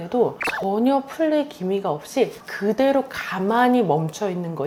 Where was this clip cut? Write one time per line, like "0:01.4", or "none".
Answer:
none